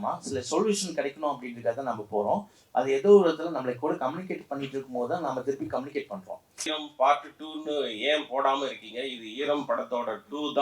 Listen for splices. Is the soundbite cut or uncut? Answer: cut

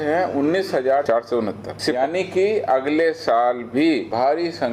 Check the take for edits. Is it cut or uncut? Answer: cut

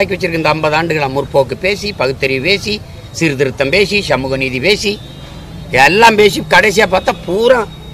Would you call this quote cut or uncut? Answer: uncut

